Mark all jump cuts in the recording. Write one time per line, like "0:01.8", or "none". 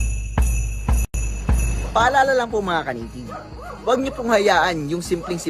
0:01.1

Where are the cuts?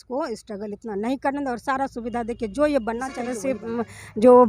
0:03.6

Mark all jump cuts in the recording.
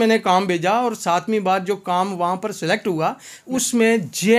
0:03.4

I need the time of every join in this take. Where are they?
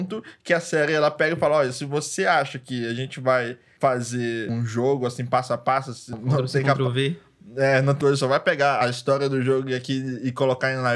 0:06.1
0:08.0

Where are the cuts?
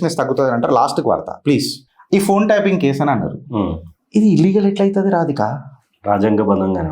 0:01.8

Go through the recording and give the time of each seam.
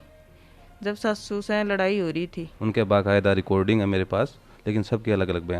0:02.4

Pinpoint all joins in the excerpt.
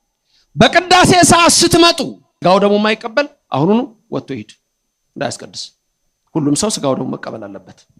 0:02.2

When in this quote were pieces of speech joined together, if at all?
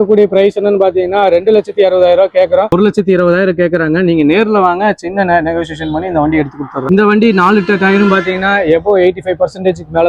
0:02.7
0:06.9

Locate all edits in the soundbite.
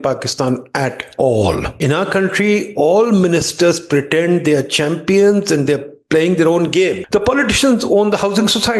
0:01.7
0:07.0

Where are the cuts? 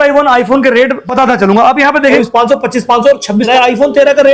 0:01.1
0:02.2
0:03.5

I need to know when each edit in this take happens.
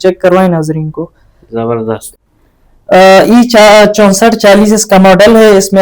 0:02.1

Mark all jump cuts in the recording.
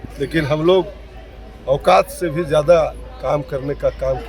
none

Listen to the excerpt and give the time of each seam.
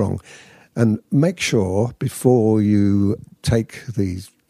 0:03.3

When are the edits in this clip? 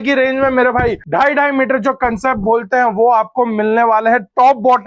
0:01.0

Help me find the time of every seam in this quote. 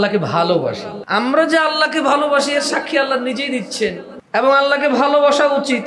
0:00.9
0:04.1

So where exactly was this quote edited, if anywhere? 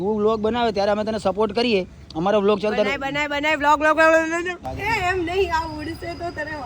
0:04.6

